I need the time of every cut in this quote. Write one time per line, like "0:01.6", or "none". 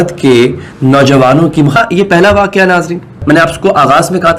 0:01.8